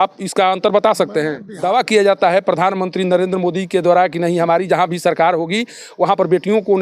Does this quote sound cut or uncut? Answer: cut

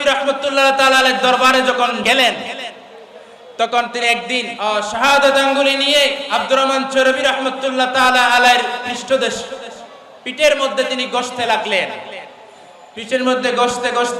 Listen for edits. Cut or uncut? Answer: cut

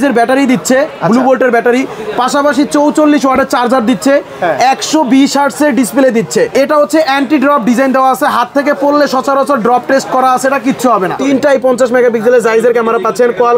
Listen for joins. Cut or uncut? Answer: cut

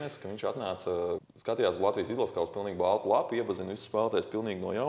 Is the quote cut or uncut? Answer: cut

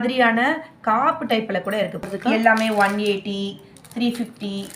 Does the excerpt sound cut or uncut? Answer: cut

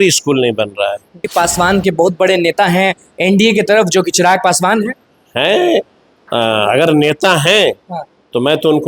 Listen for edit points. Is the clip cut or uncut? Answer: cut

